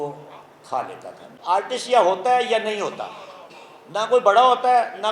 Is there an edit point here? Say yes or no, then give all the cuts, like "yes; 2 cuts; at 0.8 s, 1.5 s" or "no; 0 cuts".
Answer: yes; 1 cut; at 1.2 s